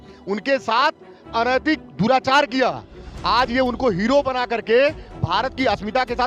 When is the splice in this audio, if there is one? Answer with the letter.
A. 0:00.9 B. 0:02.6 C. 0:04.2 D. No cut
D